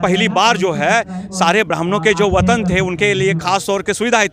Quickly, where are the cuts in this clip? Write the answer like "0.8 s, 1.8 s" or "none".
none